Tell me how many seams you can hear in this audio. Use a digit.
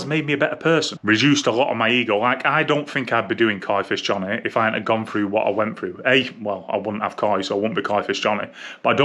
1